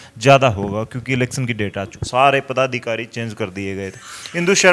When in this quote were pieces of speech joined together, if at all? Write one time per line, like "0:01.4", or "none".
0:02.0